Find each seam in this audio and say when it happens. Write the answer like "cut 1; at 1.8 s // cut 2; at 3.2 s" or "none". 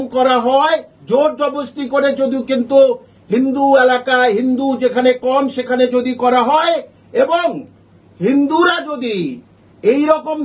none